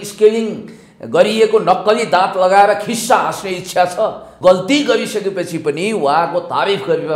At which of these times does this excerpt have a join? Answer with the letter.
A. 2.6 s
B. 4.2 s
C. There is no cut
B